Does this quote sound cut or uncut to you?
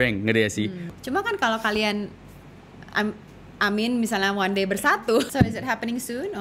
cut